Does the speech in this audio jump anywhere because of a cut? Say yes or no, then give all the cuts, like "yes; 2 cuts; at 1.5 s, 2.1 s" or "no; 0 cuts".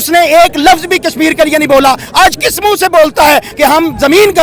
yes; 1 cut; at 3.5 s